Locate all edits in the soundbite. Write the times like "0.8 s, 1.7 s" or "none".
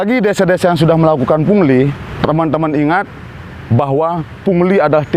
2.0 s